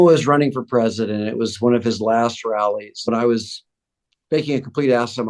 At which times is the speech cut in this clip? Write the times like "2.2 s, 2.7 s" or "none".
2.9 s